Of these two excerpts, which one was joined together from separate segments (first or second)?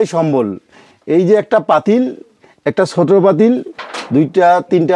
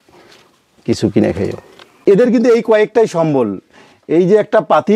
second